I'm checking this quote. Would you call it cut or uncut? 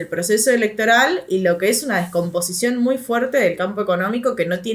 uncut